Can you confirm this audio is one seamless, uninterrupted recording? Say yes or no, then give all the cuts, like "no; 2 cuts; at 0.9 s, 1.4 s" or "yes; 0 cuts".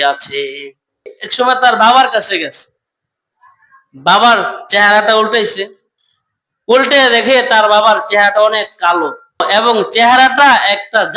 no; 2 cuts; at 1.2 s, 9.4 s